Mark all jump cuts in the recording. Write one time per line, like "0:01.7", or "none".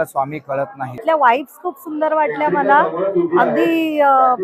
0:01.0